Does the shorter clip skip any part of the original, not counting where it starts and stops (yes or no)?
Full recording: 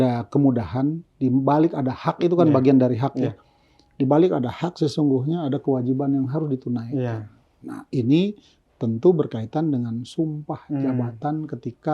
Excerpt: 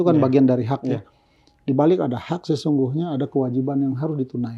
no